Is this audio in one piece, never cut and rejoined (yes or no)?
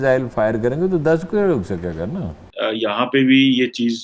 no